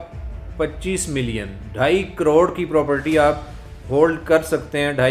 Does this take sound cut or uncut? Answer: uncut